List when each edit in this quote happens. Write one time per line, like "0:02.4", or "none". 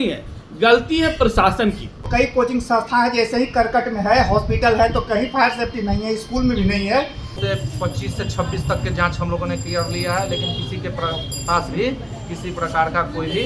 0:02.1
0:07.4